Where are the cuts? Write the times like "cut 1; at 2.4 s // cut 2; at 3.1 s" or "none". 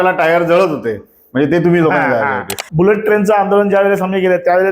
cut 1; at 2.6 s